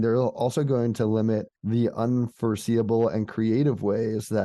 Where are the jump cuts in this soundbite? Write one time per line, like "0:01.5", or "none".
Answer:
0:01.5